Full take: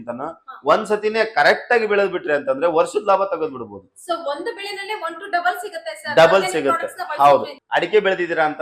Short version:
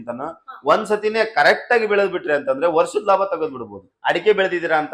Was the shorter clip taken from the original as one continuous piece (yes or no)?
no